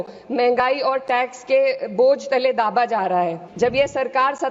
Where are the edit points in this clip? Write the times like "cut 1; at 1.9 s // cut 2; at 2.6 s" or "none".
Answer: cut 1; at 3.4 s